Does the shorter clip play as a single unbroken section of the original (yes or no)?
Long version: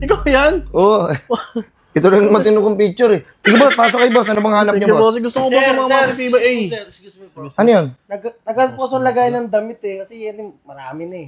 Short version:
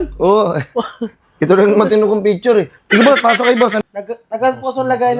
no